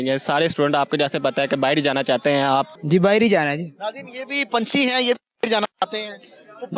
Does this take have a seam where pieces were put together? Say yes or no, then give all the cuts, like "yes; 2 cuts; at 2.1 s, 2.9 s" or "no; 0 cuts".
yes; 1 cut; at 2.7 s